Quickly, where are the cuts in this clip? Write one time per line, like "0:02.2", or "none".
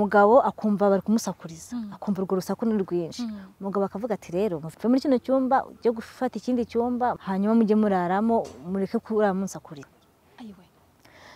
0:04.6
0:07.2
0:09.9

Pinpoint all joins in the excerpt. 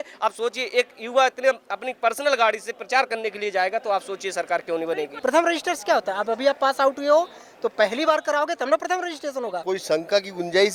0:05.1
0:09.6

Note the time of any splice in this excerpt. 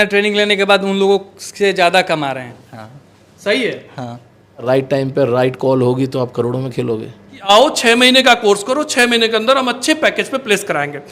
0:04.6
0:07.5

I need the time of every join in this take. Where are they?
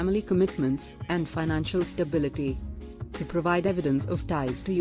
0:03.1
0:03.9

